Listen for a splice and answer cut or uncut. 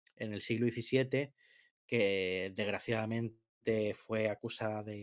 uncut